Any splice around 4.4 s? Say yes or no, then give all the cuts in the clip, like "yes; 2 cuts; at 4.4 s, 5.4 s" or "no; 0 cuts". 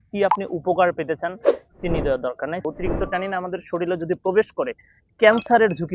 no; 1 cut; at 2.6 s